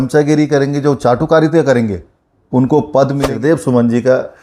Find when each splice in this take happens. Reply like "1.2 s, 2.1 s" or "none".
3.3 s